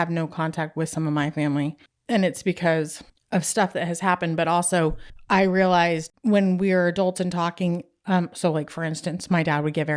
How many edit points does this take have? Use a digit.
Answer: 1